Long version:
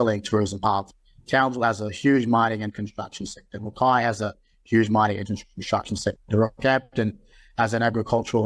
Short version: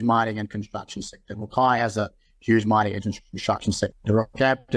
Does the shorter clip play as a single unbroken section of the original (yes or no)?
yes